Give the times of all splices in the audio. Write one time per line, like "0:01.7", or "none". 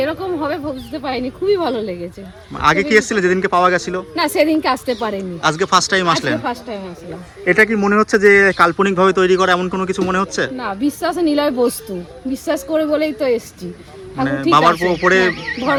none